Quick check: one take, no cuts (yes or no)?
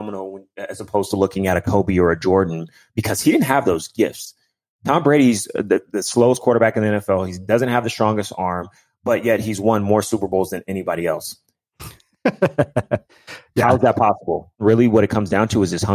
no